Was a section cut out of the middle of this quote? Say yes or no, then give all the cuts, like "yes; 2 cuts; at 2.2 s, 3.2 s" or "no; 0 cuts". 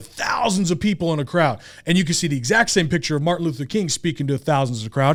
no; 0 cuts